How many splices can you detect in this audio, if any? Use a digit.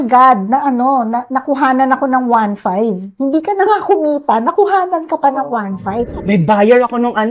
1